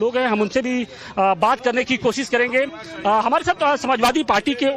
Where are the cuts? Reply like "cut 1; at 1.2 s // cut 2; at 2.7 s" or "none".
cut 1; at 2.0 s